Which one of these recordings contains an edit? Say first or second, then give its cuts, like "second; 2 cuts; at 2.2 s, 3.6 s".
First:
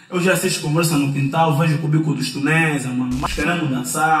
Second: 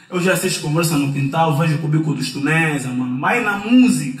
first; 1 cut; at 3.2 s